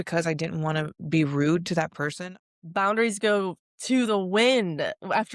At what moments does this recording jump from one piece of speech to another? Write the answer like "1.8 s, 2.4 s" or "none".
2.1 s, 3.7 s